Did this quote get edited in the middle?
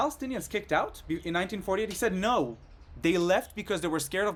no; 0 cuts

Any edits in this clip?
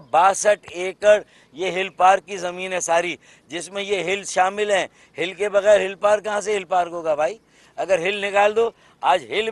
no; 0 cuts

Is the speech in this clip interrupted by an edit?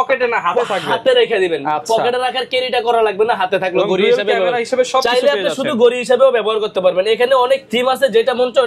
no; 0 cuts

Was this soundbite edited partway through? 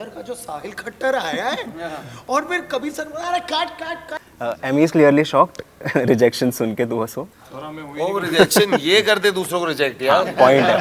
yes; 1 cut; at 4.2 s

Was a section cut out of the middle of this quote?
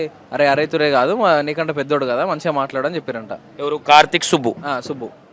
no; 0 cuts

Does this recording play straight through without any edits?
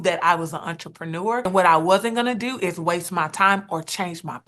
no; 1 cut; at 1.5 s

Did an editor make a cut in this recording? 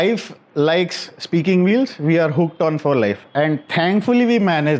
no; 0 cuts

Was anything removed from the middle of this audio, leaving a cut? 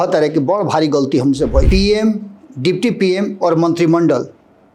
yes; 1 cut; at 1.7 s

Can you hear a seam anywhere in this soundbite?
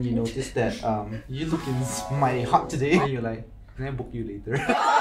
yes; 2 cuts; at 1.2 s, 3.1 s

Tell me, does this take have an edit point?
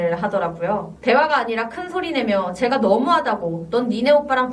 yes; 1 cut; at 0.9 s

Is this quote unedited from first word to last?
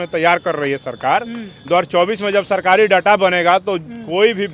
yes; 0 cuts

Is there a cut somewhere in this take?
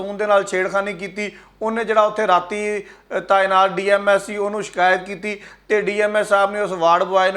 no; 0 cuts

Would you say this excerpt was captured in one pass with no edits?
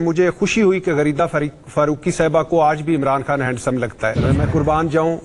no; 1 cut; at 4.2 s

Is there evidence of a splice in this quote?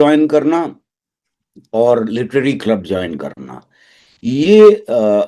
no; 0 cuts

